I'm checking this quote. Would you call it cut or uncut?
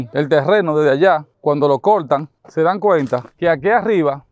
uncut